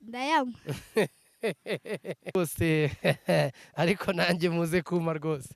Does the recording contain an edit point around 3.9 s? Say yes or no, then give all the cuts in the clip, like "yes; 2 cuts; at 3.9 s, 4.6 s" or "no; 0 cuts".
no; 1 cut; at 2.3 s